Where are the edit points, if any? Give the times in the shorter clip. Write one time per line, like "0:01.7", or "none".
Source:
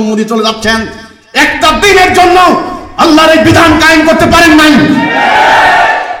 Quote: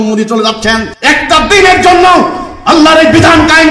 0:00.9